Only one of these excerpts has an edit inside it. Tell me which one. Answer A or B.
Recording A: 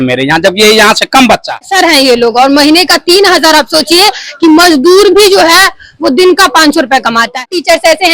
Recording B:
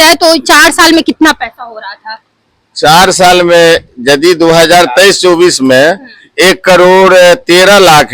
A